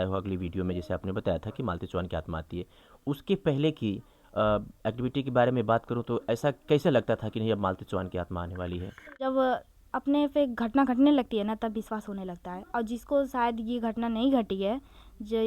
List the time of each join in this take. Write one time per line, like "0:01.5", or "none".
0:09.2